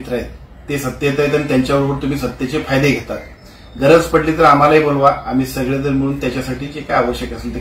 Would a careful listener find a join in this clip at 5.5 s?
no; 0 cuts

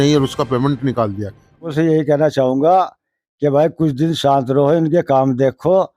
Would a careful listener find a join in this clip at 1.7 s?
yes; 1 cut; at 1.7 s

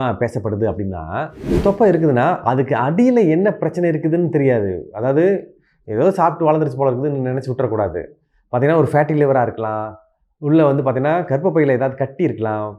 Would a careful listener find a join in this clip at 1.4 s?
yes; 1 cut; at 1.4 s

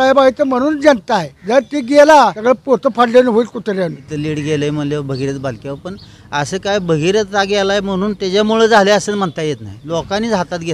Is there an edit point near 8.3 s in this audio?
no; 3 cuts; at 1.3 s, 2.4 s, 4.1 s

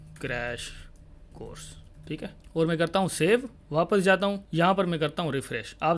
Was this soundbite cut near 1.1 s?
no; 3 cuts; at 2.4 s, 3.6 s, 4.4 s

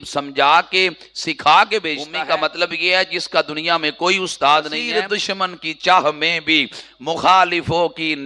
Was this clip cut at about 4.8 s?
yes; 2 cuts; at 2.1 s, 4.8 s

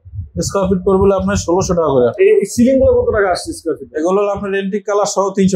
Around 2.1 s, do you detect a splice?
yes; 1 cut; at 2.1 s

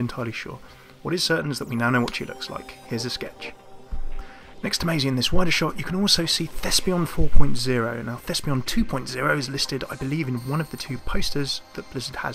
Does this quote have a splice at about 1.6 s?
no; 0 cuts

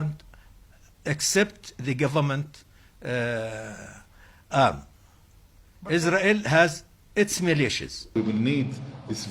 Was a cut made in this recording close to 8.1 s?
yes; 1 cut; at 8.1 s

